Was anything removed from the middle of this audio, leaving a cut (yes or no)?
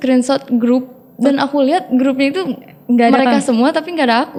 no